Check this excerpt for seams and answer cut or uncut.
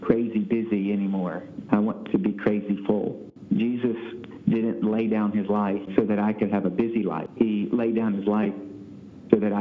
cut